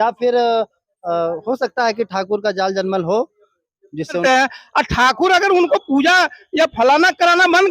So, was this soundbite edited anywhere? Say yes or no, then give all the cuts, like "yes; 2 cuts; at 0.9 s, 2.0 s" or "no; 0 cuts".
yes; 1 cut; at 4.2 s